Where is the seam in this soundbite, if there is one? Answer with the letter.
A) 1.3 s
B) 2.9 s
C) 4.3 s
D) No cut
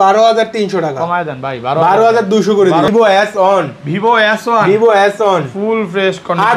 B